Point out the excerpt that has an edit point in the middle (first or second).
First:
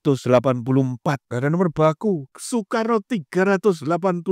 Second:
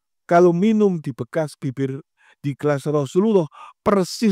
first